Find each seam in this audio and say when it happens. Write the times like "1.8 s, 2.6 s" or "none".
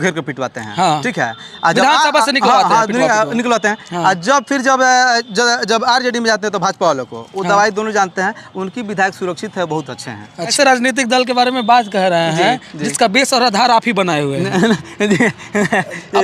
10.5 s